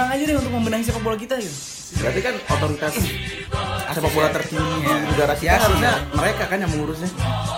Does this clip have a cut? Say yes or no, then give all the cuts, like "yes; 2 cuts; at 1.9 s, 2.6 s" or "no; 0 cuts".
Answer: no; 0 cuts